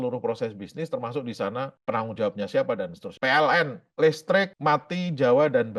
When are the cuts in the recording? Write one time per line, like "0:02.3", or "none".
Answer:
0:03.1
0:04.5